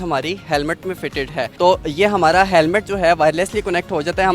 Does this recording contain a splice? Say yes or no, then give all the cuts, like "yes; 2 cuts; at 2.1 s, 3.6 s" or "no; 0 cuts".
no; 0 cuts